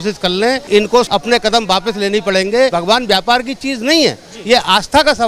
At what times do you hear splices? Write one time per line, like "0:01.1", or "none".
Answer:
0:00.9
0:02.7